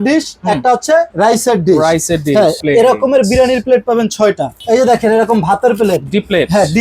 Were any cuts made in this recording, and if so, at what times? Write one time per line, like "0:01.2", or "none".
0:02.6
0:04.5